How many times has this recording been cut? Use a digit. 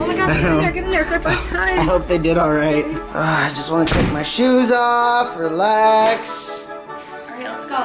1